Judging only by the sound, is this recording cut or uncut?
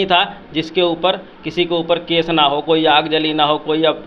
uncut